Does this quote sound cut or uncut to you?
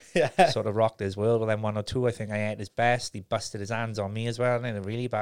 uncut